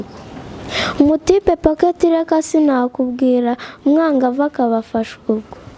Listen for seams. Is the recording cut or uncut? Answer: uncut